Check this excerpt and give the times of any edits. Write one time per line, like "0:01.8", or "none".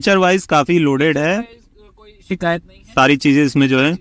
none